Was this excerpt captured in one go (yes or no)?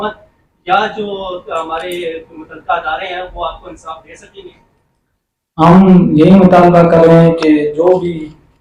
yes